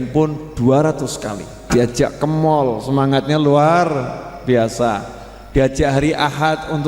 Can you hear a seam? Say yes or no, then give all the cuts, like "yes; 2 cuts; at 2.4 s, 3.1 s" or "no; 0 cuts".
yes; 1 cut; at 1.6 s